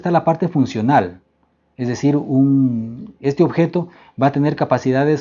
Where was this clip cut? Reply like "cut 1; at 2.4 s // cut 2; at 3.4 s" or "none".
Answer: none